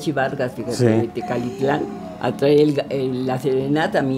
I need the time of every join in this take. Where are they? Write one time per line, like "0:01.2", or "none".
none